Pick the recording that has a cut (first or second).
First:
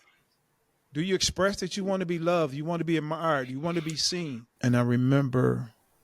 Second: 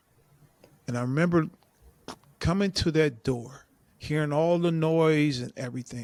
first